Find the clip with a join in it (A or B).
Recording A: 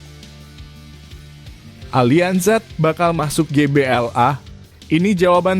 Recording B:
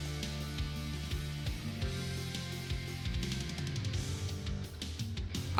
A